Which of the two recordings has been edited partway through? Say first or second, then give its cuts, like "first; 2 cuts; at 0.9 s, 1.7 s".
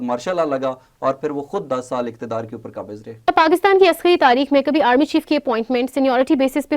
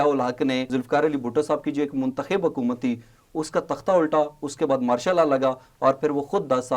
first; 1 cut; at 3.3 s